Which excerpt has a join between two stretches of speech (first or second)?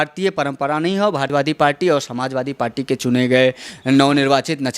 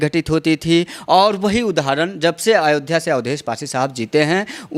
first